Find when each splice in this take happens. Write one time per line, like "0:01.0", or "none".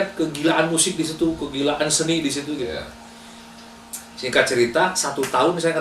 none